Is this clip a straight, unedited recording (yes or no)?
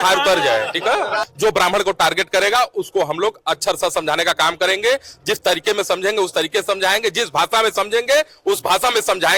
no